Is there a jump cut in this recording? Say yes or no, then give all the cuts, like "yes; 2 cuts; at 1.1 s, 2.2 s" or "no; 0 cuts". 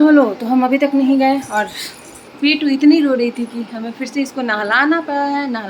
no; 0 cuts